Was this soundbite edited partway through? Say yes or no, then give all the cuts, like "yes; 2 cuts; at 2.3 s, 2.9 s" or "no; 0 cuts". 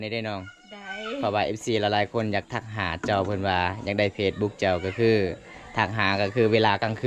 no; 0 cuts